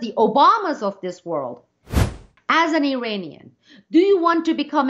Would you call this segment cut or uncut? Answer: cut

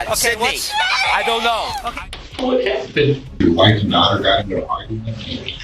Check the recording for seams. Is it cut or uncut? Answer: cut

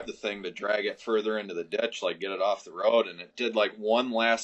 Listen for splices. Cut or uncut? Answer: uncut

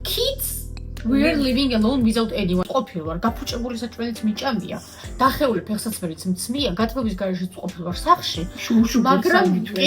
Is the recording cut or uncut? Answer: cut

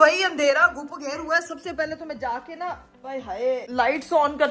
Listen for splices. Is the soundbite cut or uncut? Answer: uncut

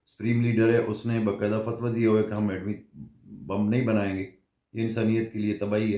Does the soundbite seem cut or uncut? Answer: uncut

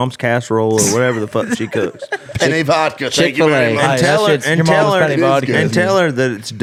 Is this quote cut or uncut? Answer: uncut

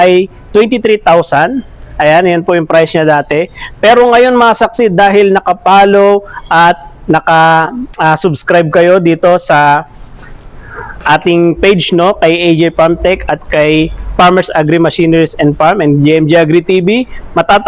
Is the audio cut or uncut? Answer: uncut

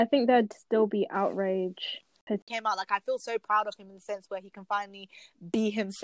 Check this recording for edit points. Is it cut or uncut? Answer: cut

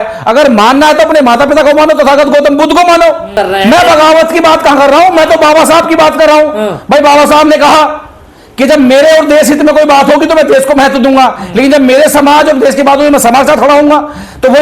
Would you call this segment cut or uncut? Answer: cut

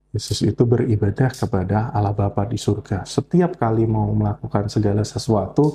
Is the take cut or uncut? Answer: uncut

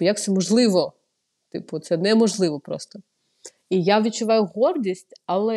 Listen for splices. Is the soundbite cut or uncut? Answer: uncut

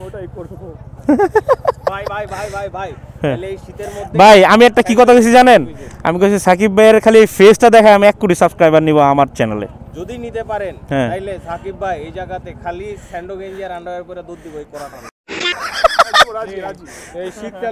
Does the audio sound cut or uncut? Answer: uncut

